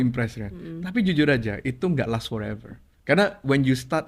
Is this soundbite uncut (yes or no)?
yes